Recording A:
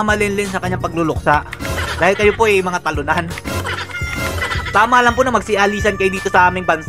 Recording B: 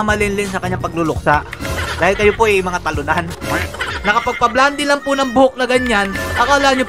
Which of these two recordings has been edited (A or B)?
B